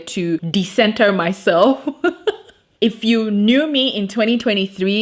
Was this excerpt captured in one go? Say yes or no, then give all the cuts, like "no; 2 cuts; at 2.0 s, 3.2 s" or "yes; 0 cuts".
no; 1 cut; at 2.8 s